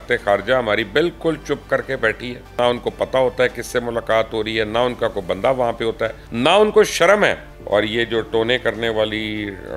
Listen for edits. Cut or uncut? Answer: cut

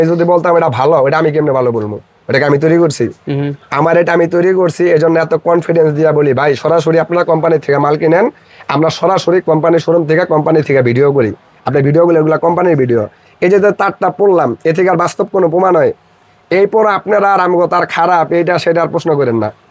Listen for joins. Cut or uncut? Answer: uncut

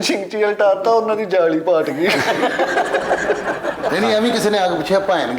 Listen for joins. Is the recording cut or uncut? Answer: cut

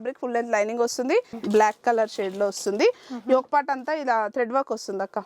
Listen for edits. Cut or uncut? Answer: cut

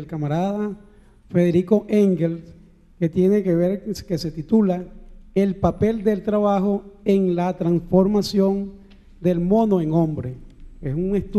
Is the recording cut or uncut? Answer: cut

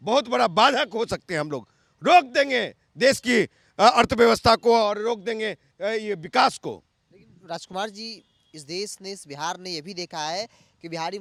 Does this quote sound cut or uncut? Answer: uncut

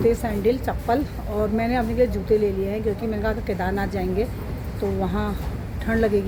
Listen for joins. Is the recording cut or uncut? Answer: uncut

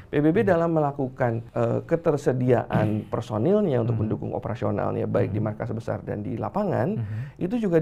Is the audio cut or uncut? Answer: cut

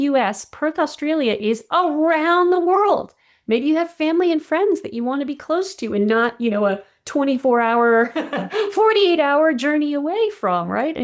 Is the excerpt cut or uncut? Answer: uncut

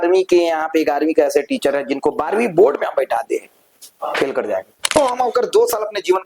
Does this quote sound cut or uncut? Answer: cut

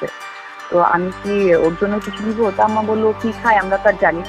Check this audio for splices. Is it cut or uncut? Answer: uncut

